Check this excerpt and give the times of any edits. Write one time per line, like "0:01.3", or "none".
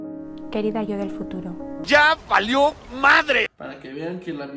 0:03.5